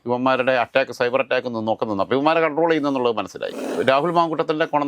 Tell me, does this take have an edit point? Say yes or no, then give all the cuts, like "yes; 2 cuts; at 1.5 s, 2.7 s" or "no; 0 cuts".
yes; 1 cut; at 3.7 s